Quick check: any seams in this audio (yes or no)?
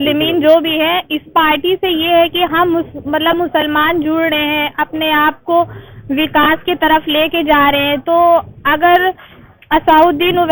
no